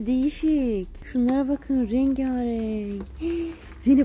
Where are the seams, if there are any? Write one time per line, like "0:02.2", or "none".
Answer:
0:00.9